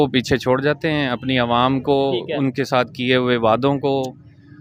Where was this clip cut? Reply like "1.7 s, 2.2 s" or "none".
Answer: none